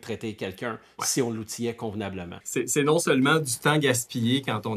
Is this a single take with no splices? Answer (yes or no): no